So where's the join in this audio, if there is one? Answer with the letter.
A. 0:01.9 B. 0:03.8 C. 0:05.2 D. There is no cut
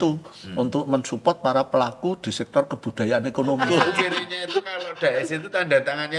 B